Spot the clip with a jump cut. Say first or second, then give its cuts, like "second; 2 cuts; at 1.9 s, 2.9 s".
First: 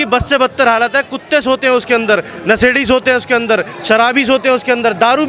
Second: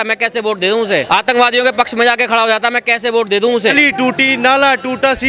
second; 2 cuts; at 1.1 s, 3.7 s